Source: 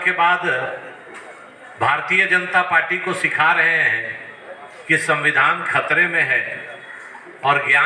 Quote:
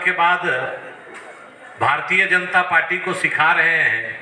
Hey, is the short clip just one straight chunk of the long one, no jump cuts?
yes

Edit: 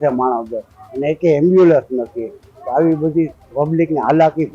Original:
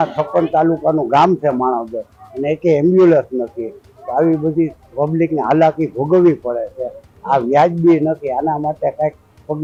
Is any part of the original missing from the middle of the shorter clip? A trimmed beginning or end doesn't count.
no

